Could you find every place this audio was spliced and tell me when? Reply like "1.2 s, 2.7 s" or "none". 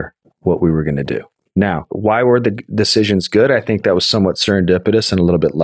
1.8 s